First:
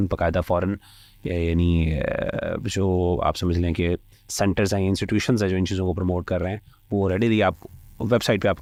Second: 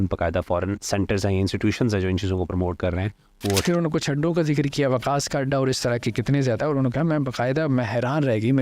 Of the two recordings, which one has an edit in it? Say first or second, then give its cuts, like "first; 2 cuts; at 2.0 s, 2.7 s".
second; 2 cuts; at 0.8 s, 3.6 s